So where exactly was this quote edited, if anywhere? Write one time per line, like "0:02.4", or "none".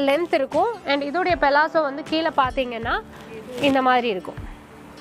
none